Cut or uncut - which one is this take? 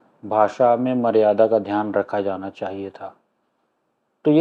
uncut